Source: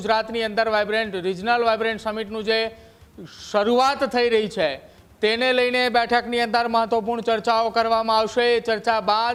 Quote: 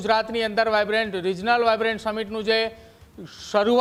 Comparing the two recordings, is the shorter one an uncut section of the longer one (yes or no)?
yes